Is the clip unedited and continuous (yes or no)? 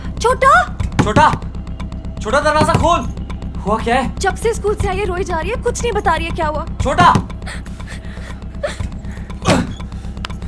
yes